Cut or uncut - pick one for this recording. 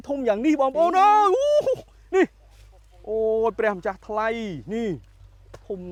uncut